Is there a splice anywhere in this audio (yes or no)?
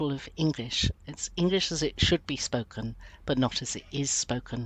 no